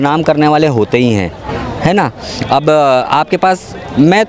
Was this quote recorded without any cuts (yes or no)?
yes